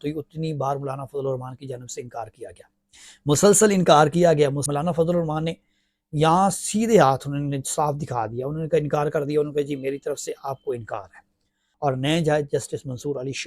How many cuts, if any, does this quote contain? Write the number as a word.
two